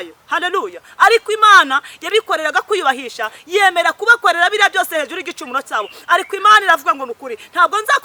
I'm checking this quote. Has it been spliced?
no; 0 cuts

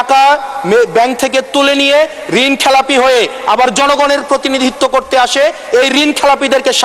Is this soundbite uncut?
yes; 0 cuts

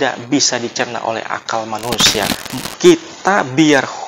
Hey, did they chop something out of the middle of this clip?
yes; 1 cut; at 2.4 s

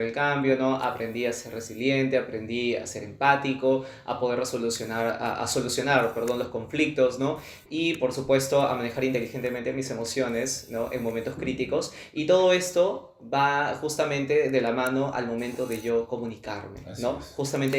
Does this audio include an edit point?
no; 0 cuts

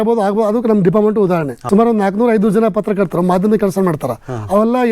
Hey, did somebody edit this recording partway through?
yes; 1 cut; at 1.6 s

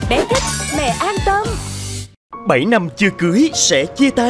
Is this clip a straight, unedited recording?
no; 1 cut; at 2.3 s

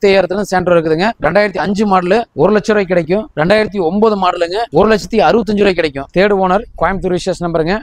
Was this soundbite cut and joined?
yes; 5 cuts; at 1.1 s, 2.3 s, 3.3 s, 4.6 s, 6.0 s

